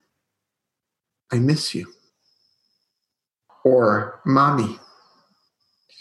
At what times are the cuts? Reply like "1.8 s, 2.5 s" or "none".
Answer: 3.5 s